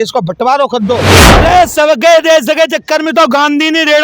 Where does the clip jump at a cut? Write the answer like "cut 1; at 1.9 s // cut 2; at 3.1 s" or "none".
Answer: cut 1; at 1.2 s